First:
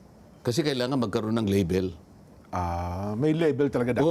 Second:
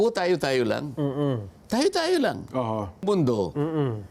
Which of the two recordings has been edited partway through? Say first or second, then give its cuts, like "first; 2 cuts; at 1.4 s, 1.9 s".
second; 1 cut; at 3.0 s